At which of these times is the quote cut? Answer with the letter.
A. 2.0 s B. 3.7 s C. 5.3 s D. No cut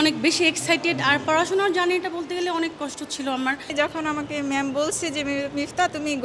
B